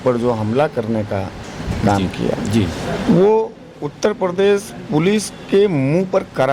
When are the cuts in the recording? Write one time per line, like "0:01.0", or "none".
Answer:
none